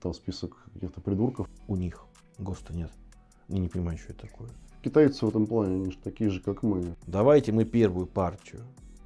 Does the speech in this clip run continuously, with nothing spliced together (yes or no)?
no